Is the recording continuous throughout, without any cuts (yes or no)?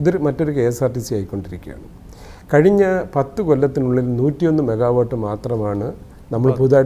yes